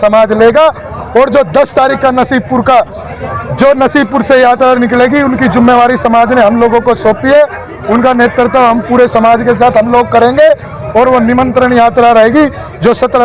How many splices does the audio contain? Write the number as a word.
zero